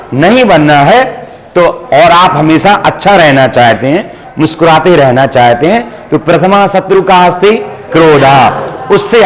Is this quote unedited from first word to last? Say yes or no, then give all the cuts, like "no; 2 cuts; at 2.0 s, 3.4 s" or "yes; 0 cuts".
yes; 0 cuts